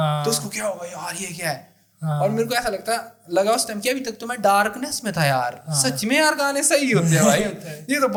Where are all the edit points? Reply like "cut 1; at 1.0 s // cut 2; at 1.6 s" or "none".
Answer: none

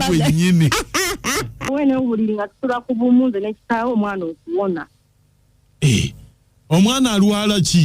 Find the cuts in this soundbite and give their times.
cut 1; at 1.6 s

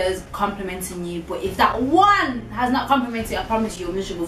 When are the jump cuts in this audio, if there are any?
none

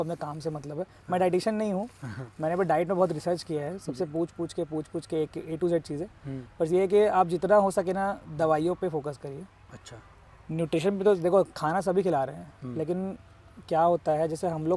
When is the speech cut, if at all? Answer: none

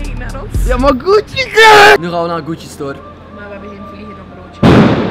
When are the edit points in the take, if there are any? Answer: cut 1; at 2.0 s

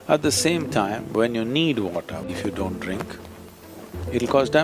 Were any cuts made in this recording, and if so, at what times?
cut 1; at 2.3 s

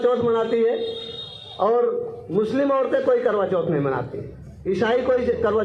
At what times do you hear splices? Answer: none

